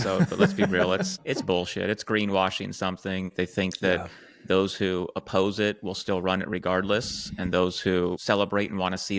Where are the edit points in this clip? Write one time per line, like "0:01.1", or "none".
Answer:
0:01.2
0:03.3
0:08.2